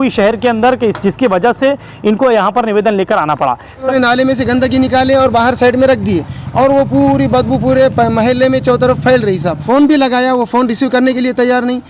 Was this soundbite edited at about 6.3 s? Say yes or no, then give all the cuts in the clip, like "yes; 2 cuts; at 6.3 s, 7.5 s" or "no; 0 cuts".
no; 2 cuts; at 3.9 s, 9.5 s